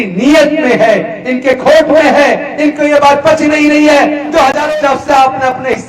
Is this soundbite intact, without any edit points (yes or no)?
no